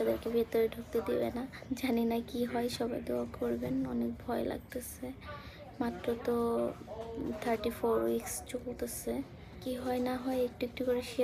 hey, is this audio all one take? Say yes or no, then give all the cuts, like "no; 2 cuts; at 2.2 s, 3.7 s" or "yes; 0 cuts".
no; 2 cuts; at 1.6 s, 9.6 s